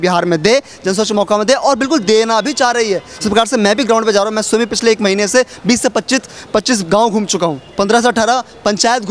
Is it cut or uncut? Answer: uncut